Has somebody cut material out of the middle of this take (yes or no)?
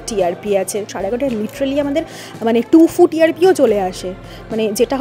yes